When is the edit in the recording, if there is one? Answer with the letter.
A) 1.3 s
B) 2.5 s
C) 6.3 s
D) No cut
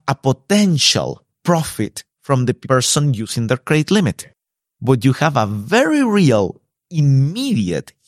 A